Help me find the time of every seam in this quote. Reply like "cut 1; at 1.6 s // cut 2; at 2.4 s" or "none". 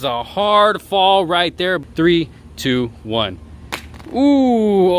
cut 1; at 1.8 s